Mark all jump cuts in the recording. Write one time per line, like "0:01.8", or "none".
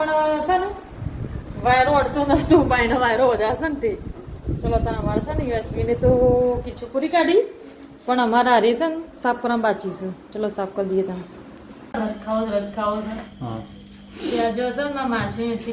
0:11.9